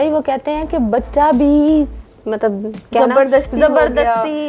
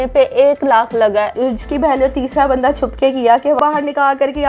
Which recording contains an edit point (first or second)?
second